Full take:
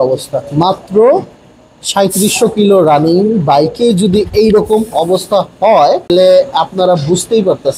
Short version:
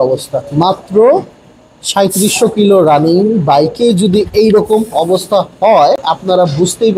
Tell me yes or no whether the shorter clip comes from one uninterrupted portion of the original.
no